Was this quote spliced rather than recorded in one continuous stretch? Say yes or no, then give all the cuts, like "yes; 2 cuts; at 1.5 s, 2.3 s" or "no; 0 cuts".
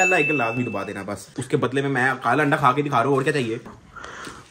yes; 2 cuts; at 1.3 s, 3.7 s